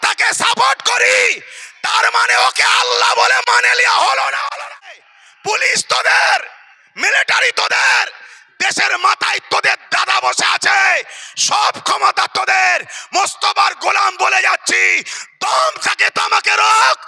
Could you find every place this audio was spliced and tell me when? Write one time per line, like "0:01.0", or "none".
0:04.8